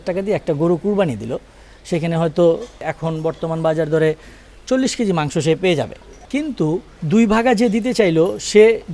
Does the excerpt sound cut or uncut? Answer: cut